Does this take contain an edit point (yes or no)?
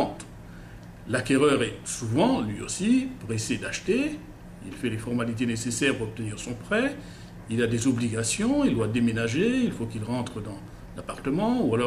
no